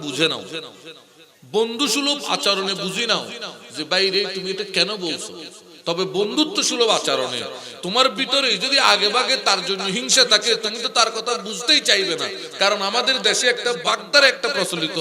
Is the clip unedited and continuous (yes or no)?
no